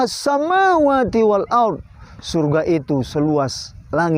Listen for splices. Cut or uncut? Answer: uncut